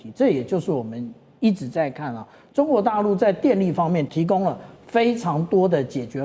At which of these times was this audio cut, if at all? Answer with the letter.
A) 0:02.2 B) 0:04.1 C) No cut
B